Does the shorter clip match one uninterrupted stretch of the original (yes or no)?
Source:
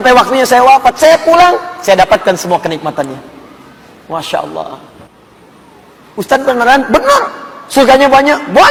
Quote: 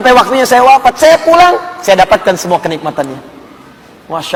yes